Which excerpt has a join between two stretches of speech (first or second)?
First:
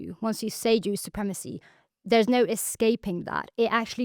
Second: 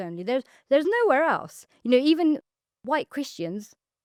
first